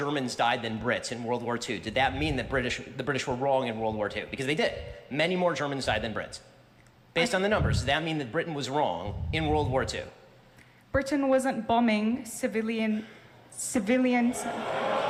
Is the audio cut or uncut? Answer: uncut